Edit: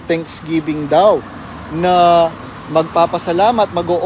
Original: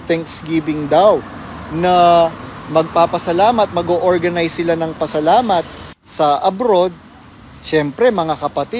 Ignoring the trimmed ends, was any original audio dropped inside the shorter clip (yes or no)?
no